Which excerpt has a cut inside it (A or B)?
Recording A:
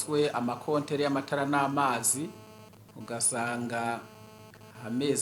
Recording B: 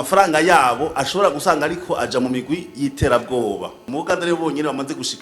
B